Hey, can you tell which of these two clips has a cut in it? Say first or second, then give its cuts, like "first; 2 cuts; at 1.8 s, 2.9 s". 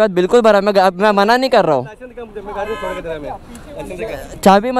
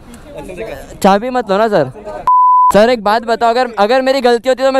second; 1 cut; at 2.5 s